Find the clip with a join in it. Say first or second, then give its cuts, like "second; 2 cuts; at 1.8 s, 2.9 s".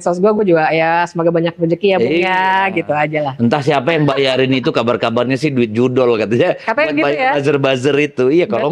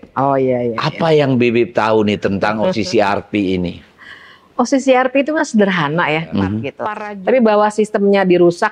second; 1 cut; at 6.8 s